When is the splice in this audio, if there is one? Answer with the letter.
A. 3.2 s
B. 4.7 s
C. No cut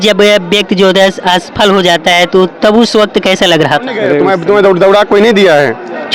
B